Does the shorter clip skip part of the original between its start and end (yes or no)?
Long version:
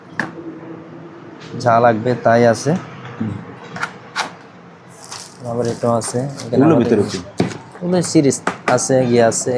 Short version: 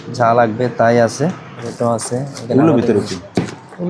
yes